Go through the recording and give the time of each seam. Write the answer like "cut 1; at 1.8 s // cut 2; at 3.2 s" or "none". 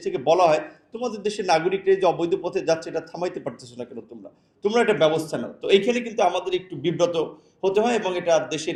none